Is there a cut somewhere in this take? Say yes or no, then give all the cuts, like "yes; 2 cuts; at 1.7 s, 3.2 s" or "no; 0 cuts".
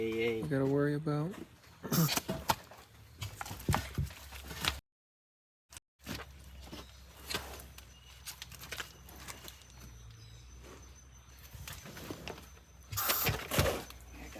no; 0 cuts